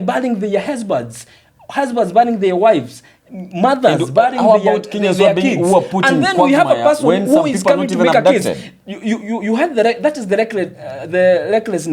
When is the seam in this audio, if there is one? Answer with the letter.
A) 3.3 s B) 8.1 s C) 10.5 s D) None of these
D